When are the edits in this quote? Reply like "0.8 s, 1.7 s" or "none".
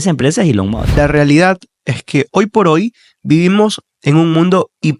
1.0 s

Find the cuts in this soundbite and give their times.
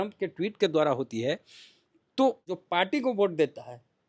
2.4 s

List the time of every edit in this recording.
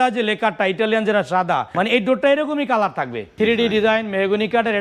1.7 s, 3.2 s

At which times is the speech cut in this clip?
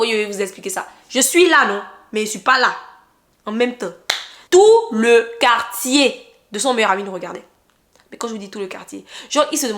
4.3 s

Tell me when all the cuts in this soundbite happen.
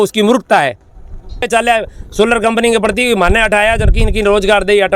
1.5 s

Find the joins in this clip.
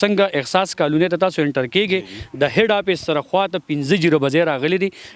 none

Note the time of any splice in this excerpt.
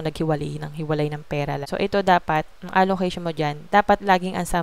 1.6 s

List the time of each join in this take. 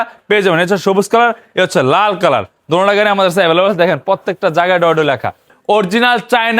5.5 s

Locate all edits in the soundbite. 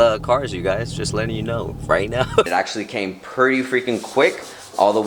2.5 s

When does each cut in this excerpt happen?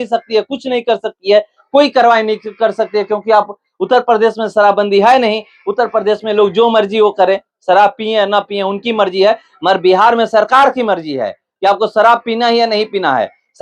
none

